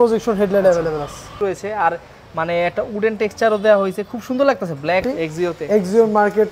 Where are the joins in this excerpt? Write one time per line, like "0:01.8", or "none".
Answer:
0:01.2
0:05.0